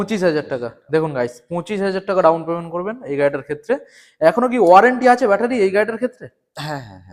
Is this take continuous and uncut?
yes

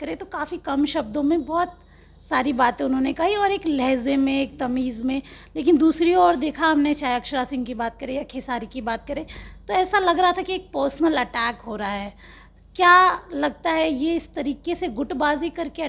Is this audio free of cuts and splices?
yes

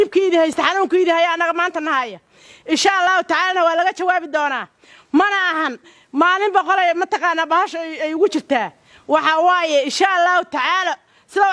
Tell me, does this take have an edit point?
no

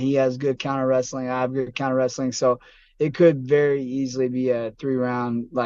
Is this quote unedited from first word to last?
yes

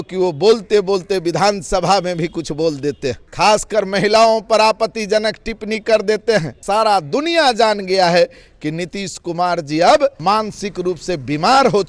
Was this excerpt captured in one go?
no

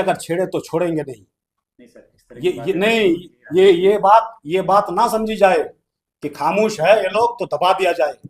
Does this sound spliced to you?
no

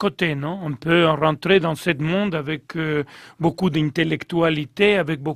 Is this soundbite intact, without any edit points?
no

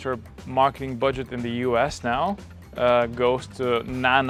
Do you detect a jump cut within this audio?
no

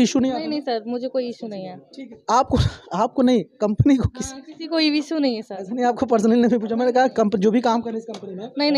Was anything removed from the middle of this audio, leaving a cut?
no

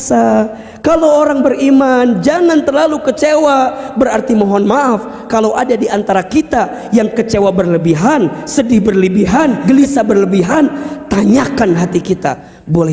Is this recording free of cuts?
no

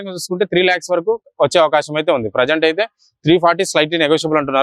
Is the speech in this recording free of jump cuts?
yes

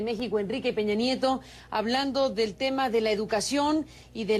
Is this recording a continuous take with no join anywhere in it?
no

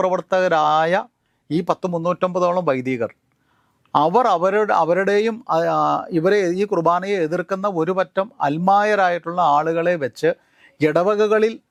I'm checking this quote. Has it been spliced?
no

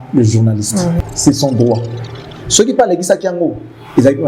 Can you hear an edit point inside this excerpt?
yes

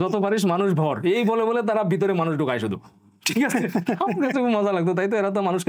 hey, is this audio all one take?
yes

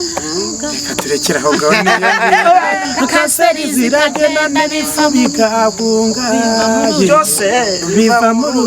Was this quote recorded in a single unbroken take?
no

